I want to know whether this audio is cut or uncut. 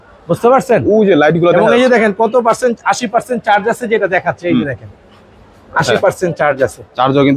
uncut